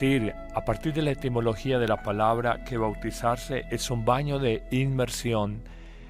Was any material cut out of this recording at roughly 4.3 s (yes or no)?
no